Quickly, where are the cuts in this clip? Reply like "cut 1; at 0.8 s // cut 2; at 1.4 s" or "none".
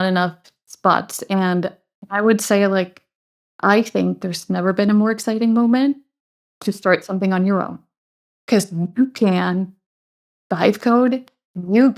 cut 1; at 1.8 s